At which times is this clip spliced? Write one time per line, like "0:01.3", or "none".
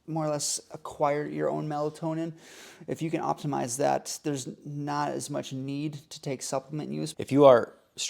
0:07.1